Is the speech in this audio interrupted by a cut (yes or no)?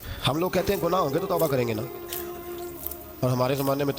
no